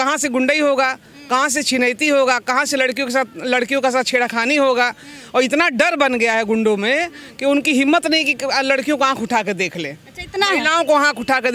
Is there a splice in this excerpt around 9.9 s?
no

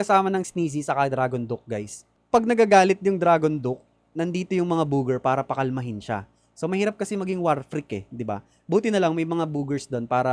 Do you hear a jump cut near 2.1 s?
yes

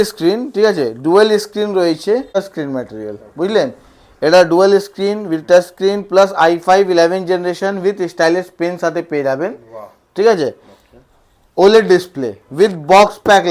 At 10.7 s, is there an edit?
no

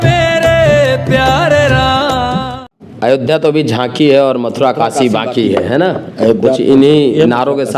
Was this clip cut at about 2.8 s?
yes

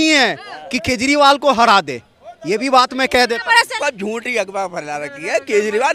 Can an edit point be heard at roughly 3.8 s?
yes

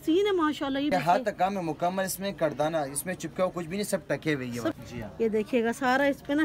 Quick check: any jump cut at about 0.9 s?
yes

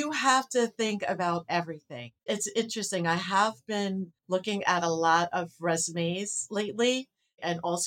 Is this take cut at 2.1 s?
yes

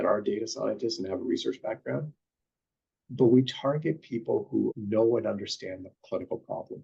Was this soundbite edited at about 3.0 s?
no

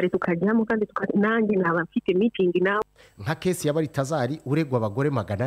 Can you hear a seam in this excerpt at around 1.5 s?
no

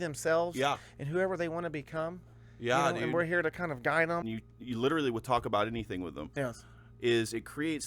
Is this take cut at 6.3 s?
no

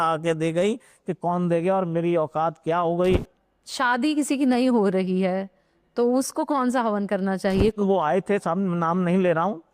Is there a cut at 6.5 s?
no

